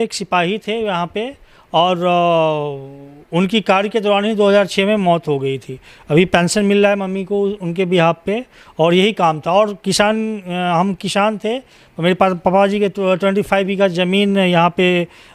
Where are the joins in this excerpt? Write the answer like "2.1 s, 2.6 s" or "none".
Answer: none

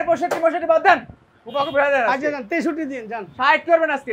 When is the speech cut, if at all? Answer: none

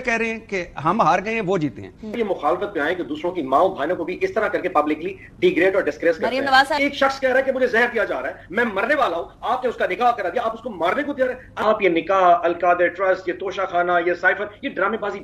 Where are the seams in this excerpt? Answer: 2.2 s, 6.7 s, 11.5 s

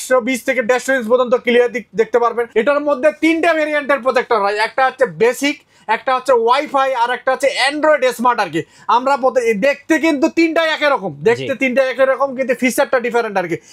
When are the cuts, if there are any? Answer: 2.4 s

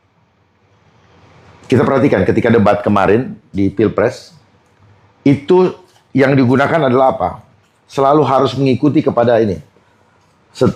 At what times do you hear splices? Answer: none

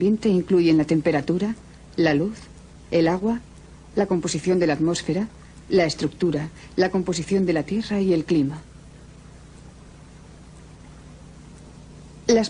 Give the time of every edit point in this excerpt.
none

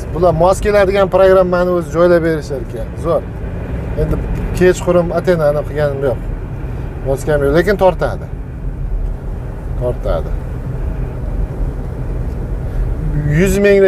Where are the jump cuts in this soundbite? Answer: none

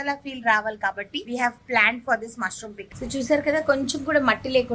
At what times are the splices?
1.1 s, 2.8 s

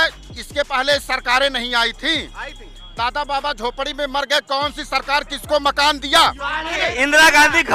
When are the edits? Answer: 6.8 s

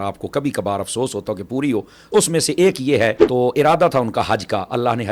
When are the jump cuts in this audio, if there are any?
2.1 s, 3.2 s

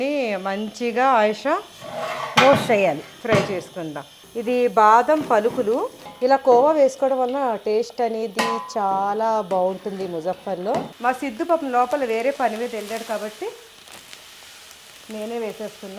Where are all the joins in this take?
4.3 s, 6.0 s, 10.9 s

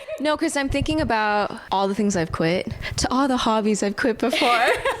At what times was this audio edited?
1.6 s, 2.8 s

